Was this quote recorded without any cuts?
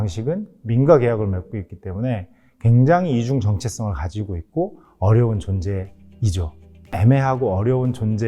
no; 1 cut; at 6.9 s

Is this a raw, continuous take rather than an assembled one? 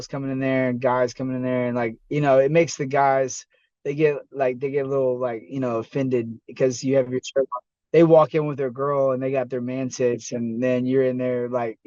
yes; 0 cuts

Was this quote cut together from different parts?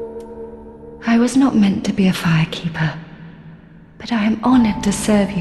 yes; 1 cut; at 1.0 s

